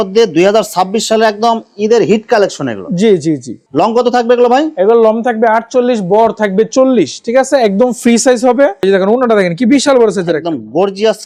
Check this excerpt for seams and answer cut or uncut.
uncut